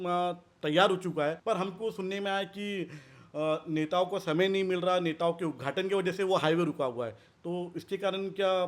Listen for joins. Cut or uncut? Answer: cut